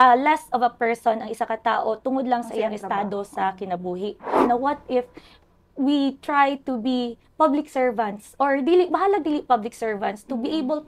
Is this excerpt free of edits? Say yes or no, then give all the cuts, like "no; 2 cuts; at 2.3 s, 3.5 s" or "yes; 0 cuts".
no; 1 cut; at 4.5 s